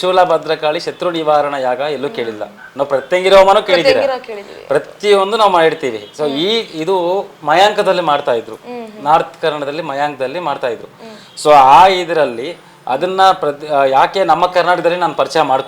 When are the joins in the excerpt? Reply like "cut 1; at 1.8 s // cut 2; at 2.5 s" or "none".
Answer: none